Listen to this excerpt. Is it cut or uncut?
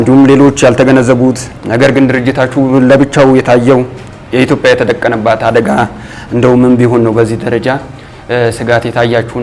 uncut